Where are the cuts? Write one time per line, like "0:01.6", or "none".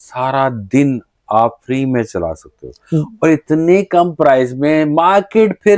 none